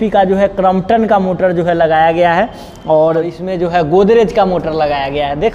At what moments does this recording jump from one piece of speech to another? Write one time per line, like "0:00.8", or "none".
0:03.4